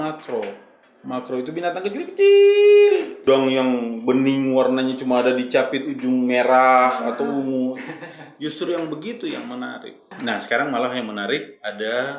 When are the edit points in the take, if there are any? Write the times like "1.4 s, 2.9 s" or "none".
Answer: 3.2 s, 10.1 s